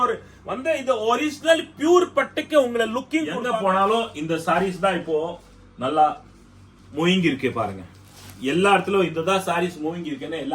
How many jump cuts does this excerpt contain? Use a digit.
1